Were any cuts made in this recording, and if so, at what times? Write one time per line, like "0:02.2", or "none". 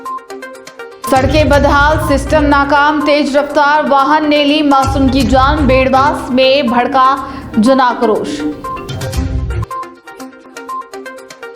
none